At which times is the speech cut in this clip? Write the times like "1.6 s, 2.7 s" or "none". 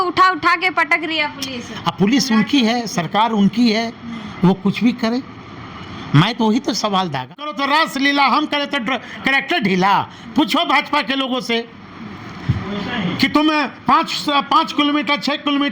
7.3 s